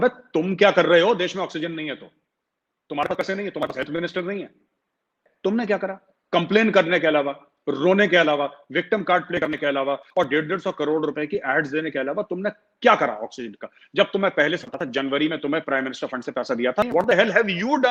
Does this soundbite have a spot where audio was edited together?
yes; 2 cuts; at 5.3 s, 16.9 s

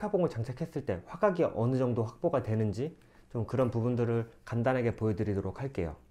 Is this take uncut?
yes; 0 cuts

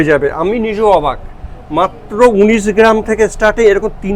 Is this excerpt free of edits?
yes; 0 cuts

